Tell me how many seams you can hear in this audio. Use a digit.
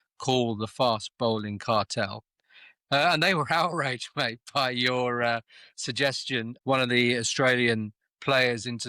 1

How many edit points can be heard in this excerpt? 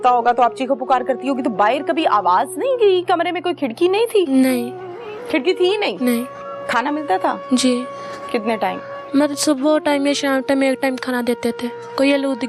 0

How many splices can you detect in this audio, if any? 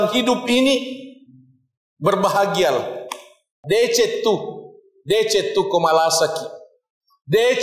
1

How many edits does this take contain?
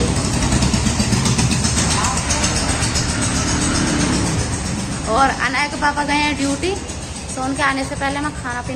0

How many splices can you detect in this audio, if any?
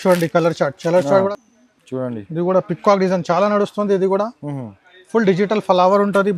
1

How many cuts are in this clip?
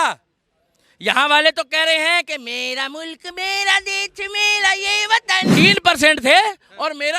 1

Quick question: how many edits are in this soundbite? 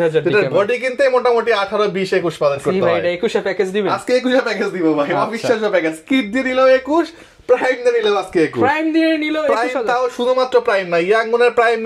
0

